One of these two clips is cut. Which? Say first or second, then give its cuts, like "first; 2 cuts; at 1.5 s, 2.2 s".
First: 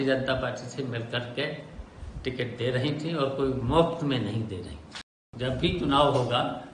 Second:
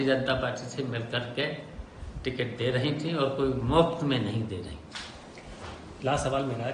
first; 1 cut; at 5.2 s